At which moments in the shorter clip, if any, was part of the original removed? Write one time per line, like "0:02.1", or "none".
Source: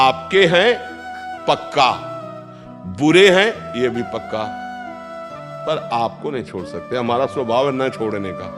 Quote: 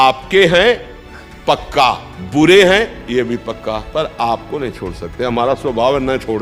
0:02.1
0:03.8